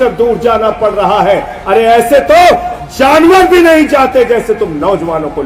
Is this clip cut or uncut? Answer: uncut